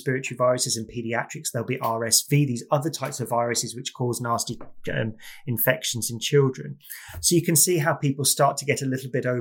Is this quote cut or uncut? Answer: uncut